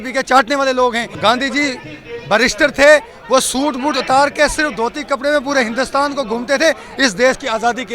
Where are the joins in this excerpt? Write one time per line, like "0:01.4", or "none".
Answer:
0:01.1